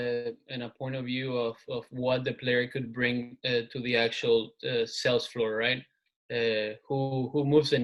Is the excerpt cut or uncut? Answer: uncut